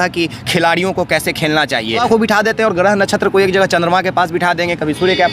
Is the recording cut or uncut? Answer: cut